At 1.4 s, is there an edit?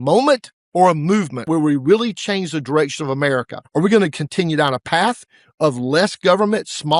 yes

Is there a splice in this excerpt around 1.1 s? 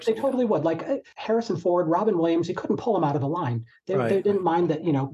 yes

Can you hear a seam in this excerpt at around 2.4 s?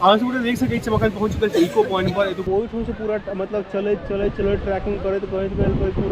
yes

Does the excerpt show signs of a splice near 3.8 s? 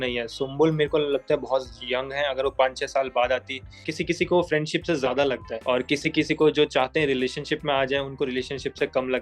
yes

